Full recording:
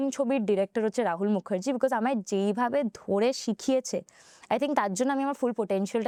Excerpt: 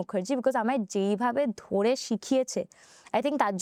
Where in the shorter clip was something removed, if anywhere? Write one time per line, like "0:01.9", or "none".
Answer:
none